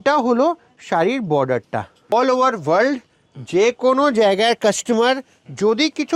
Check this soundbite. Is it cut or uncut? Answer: cut